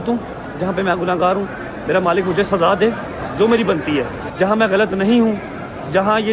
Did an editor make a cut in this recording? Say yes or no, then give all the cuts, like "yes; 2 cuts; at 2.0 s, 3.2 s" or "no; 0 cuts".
yes; 1 cut; at 4.2 s